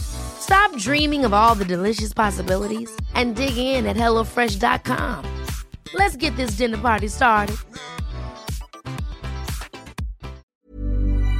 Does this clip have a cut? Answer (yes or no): yes